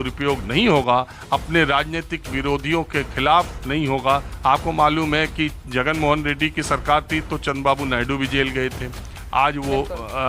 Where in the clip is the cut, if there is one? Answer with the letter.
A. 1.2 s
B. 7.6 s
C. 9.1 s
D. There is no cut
A